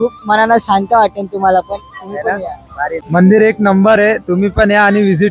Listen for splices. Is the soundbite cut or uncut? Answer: cut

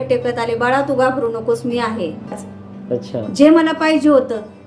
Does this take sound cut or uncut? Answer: cut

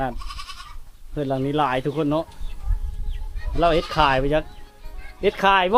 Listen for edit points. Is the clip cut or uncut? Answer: uncut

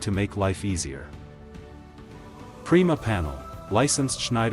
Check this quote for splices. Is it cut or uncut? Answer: cut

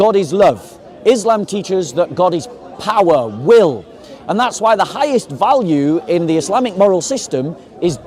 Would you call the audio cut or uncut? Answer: uncut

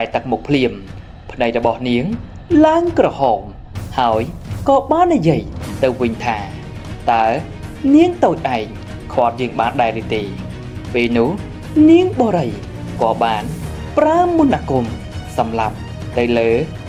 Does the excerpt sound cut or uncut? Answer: uncut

